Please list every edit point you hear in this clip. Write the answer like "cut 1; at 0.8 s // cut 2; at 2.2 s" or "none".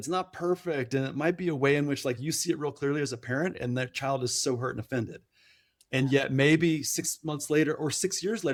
none